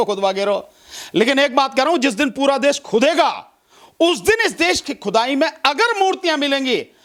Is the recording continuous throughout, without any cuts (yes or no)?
yes